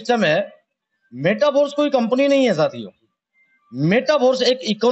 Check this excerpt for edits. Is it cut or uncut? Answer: uncut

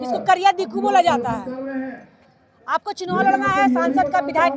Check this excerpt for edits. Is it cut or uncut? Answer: uncut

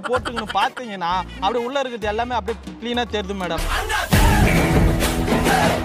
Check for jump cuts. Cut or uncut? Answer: uncut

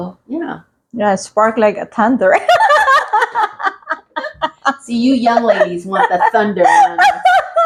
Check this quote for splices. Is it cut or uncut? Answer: uncut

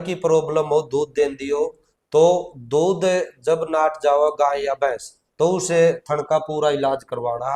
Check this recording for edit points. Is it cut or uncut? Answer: uncut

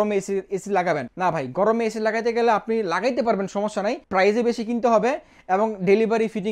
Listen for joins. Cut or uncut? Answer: cut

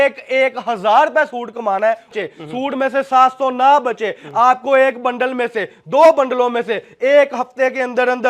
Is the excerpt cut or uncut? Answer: cut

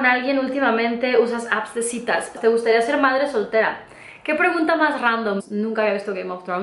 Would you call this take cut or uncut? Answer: cut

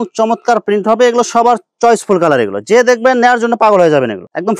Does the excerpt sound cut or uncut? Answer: uncut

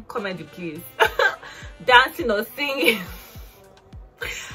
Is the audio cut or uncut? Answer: uncut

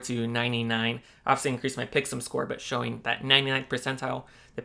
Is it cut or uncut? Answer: uncut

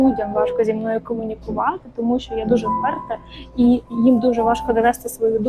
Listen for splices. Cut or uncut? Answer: uncut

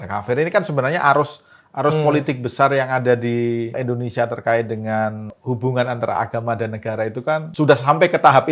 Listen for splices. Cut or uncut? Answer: cut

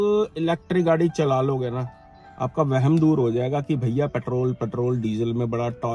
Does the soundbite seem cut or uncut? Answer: uncut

